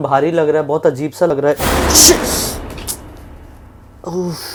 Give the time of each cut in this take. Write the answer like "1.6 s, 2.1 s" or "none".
none